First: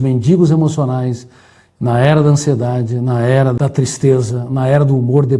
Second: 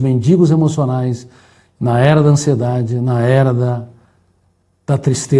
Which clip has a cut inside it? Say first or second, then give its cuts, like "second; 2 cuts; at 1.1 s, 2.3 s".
first; 1 cut; at 3.6 s